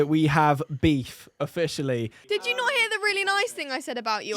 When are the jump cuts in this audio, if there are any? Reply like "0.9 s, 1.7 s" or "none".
2.6 s